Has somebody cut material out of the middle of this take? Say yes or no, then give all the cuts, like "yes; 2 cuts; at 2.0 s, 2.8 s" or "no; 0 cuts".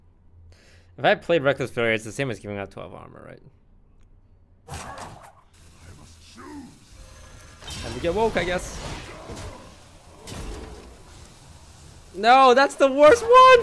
no; 0 cuts